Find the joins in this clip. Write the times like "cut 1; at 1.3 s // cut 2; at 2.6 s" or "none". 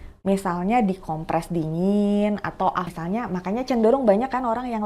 cut 1; at 2.9 s